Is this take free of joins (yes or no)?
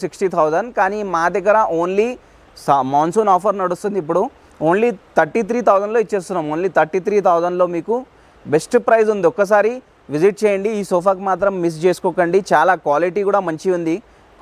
yes